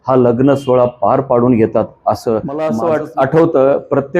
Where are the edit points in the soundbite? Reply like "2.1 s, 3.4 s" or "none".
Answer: 2.6 s